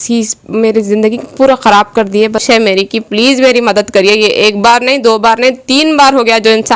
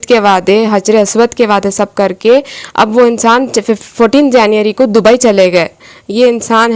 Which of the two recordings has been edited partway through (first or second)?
first